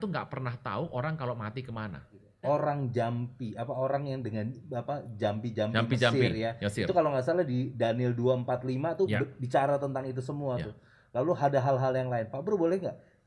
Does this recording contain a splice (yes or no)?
yes